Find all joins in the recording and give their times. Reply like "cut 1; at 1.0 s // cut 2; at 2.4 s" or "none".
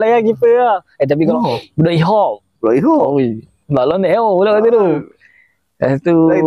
cut 1; at 1.3 s